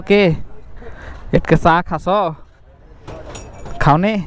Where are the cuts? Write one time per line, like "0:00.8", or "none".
none